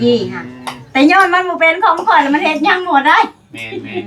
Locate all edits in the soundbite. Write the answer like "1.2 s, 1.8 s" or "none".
none